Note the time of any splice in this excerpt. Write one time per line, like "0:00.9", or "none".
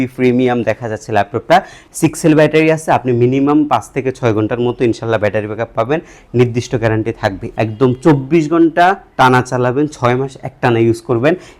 0:01.8
0:07.4